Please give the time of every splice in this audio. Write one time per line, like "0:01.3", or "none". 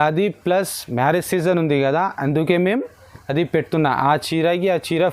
none